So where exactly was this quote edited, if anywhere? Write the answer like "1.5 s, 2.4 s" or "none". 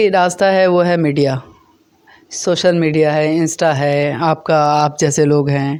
none

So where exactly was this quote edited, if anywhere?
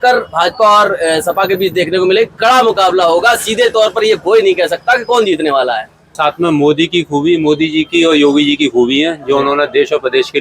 6.2 s

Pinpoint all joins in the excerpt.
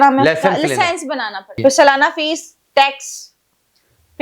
1.6 s

